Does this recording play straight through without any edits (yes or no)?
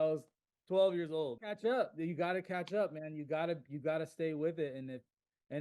no